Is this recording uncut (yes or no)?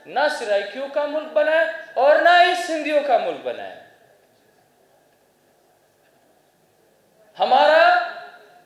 yes